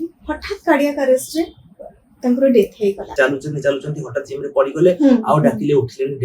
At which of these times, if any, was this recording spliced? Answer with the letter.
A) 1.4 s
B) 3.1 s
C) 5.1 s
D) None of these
B